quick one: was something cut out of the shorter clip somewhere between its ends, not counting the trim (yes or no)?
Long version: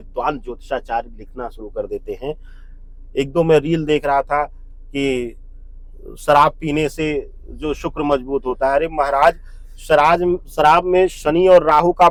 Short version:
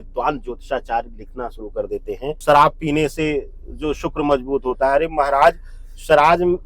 yes